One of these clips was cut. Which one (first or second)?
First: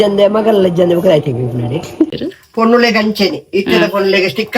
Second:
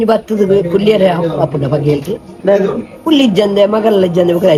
first